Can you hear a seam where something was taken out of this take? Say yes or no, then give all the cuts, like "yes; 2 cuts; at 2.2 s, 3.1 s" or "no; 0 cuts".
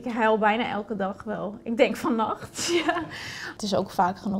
yes; 1 cut; at 3.5 s